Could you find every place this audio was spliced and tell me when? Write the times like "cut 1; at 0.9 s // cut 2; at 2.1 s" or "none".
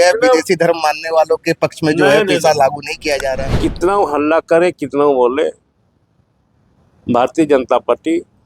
cut 1; at 3.5 s